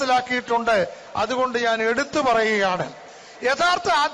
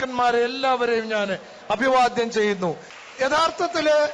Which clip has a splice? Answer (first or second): second